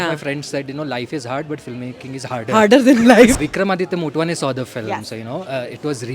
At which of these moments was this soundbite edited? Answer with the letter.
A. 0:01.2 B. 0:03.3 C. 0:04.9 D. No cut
B